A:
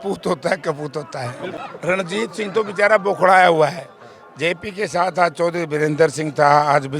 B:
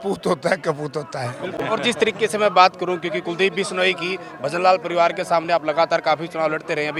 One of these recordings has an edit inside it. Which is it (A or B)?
A